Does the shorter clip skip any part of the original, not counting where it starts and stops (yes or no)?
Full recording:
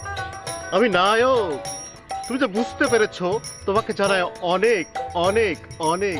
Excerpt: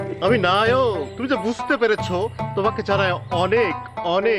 yes